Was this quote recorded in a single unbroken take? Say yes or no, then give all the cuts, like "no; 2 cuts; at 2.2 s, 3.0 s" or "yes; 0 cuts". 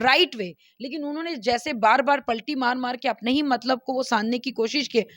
yes; 0 cuts